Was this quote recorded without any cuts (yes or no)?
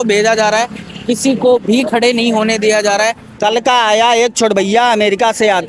no